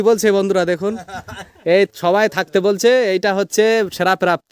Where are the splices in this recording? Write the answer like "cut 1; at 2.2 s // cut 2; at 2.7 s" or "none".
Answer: none